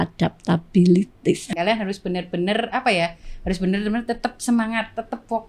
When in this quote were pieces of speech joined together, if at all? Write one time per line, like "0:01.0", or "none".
0:01.5